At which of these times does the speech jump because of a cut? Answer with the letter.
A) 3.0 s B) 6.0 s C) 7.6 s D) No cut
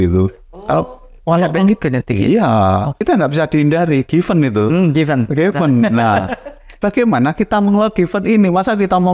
A